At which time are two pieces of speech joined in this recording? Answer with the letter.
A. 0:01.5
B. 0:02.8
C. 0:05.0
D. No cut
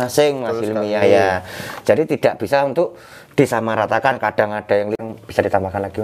C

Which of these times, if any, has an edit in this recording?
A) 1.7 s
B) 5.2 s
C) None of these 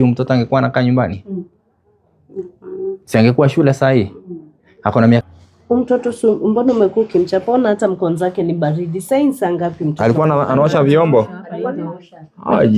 B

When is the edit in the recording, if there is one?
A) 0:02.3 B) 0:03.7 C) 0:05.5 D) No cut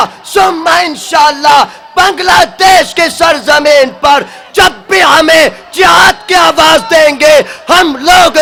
D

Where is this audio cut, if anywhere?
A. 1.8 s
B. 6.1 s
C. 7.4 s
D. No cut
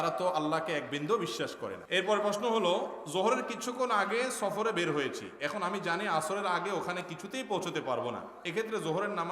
A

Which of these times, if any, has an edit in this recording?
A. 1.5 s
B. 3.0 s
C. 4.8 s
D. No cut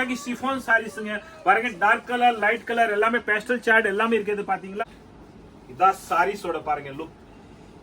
C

